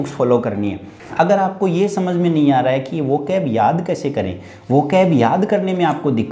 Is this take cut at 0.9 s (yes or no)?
yes